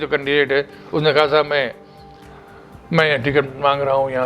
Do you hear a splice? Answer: no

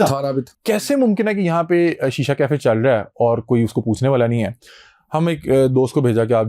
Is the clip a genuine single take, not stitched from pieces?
yes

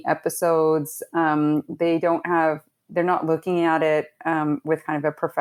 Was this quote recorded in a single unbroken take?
yes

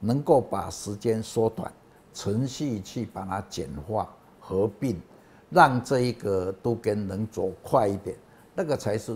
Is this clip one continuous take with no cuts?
yes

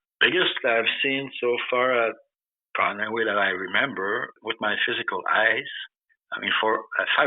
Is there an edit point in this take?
yes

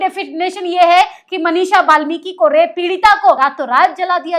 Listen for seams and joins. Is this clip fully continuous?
no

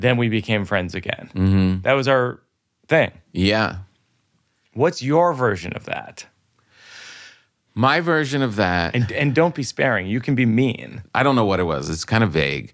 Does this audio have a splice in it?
yes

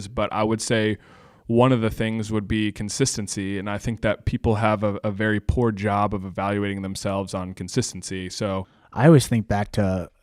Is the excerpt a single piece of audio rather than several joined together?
no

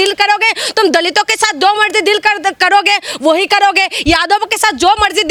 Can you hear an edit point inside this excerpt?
no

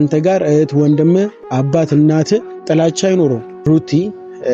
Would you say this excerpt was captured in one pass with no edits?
no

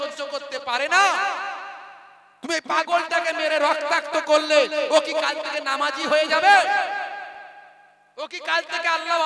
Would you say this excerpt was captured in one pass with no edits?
yes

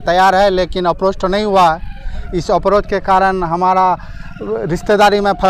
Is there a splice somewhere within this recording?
no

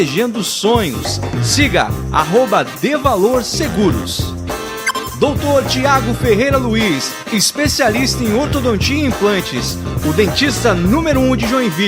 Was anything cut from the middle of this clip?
no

